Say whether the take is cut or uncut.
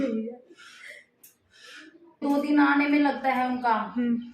cut